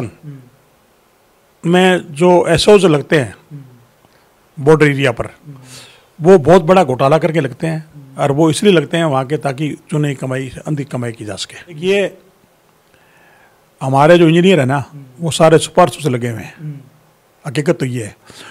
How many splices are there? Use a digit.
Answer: 1